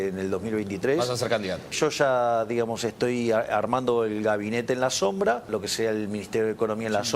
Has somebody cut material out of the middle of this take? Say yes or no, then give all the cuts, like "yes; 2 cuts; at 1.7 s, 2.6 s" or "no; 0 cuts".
yes; 2 cuts; at 1.7 s, 5.5 s